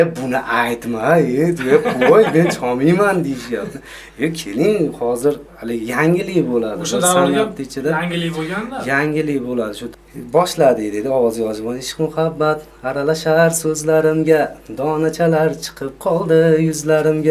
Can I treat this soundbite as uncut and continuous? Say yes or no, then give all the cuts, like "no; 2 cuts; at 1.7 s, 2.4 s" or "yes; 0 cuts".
no; 1 cut; at 9.8 s